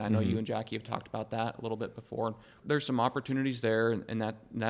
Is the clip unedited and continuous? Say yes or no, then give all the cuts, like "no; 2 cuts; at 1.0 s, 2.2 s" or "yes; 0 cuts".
no; 1 cut; at 2.5 s